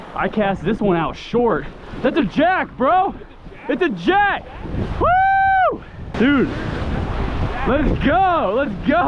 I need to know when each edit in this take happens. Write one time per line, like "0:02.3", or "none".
none

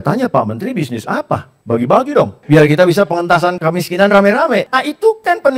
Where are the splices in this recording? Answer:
0:01.5
0:02.4
0:03.6
0:04.7

